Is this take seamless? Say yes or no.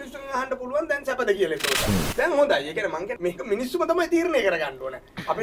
no